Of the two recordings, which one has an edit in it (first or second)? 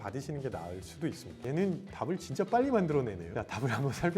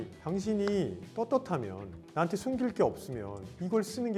first